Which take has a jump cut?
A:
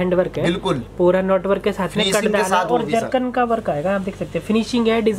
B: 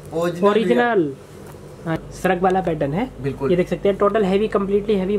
B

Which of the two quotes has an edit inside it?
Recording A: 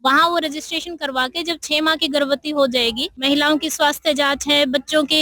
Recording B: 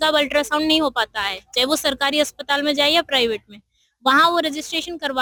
A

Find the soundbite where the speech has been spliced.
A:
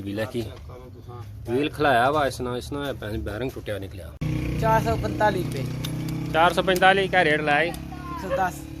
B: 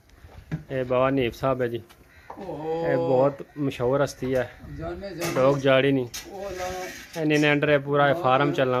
A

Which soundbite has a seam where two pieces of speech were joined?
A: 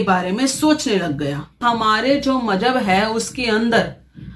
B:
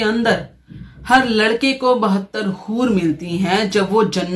A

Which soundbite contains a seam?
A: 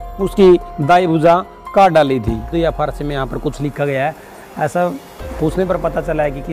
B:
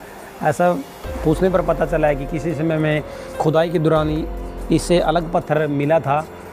A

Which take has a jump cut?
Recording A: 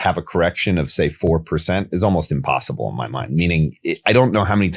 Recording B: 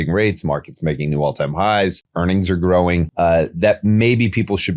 B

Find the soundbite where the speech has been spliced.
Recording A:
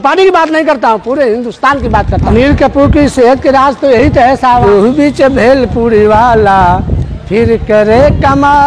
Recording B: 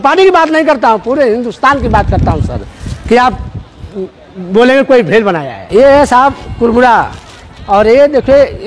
A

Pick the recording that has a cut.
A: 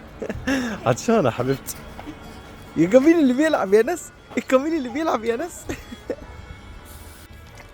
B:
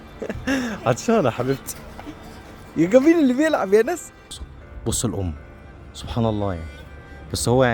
B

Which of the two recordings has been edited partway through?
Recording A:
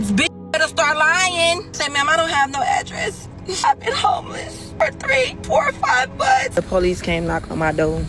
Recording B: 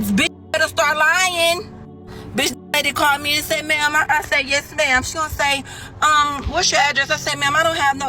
A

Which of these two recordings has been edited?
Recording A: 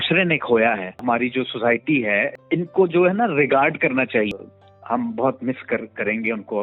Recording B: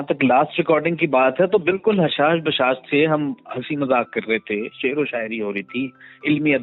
A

